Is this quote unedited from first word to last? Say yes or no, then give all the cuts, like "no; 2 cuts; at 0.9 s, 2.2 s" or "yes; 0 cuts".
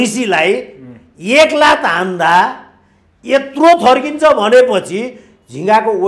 yes; 0 cuts